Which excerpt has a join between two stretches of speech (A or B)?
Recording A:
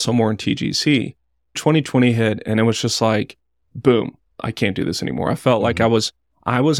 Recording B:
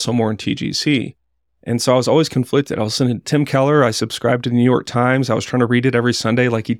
A